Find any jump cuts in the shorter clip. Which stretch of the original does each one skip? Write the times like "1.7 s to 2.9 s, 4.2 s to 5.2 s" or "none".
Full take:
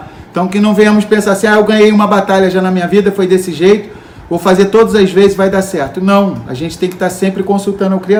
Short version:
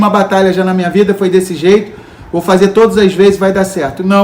none